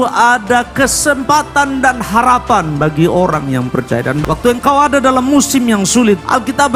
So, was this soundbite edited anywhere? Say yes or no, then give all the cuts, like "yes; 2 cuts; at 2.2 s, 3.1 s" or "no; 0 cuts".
no; 0 cuts